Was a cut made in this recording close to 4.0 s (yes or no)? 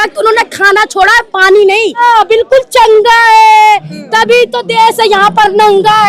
no